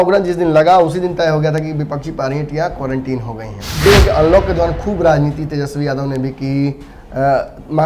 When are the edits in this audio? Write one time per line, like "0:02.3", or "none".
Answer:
0:03.9